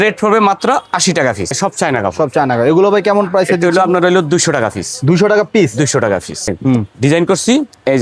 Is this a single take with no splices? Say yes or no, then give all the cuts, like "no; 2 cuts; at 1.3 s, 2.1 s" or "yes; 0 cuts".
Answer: no; 2 cuts; at 1.6 s, 6.6 s